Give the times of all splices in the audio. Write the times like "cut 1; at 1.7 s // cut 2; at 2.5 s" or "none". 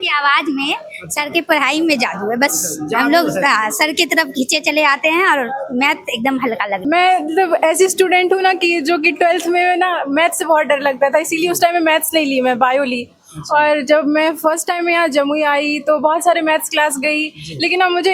cut 1; at 6.8 s